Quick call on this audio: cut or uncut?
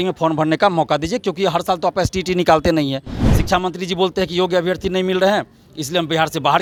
uncut